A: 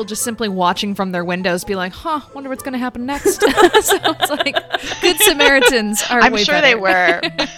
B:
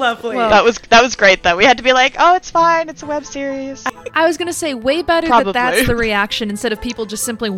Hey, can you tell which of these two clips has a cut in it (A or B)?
B